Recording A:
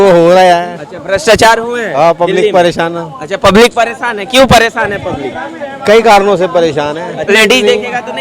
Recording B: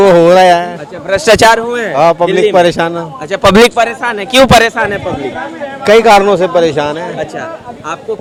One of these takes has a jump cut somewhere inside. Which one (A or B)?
A